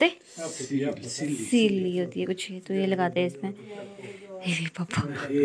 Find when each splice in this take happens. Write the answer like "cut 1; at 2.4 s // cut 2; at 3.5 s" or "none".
none